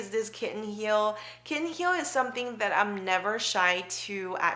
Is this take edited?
no; 0 cuts

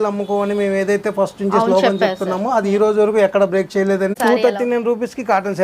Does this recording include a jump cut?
yes; 1 cut; at 4.2 s

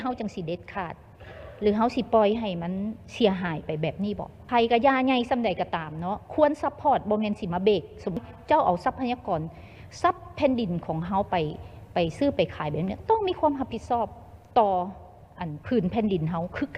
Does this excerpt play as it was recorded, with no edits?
no; 2 cuts; at 4.3 s, 8.2 s

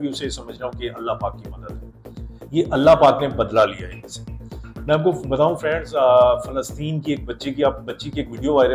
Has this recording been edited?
no; 0 cuts

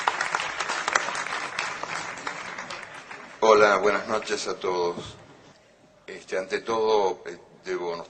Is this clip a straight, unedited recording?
yes; 0 cuts

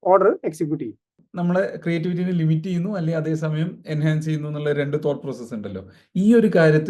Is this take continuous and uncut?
no; 1 cut; at 1.1 s

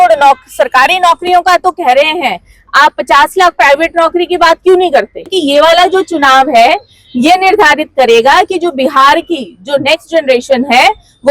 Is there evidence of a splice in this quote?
yes; 1 cut; at 5.3 s

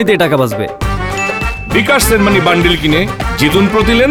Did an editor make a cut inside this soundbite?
no; 0 cuts

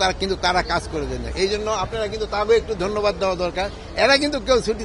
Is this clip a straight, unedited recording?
yes; 0 cuts

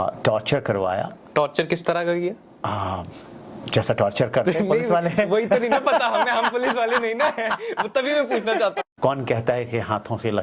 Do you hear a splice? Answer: yes; 1 cut; at 8.8 s

